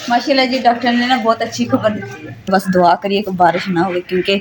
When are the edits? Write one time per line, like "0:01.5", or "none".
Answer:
0:02.5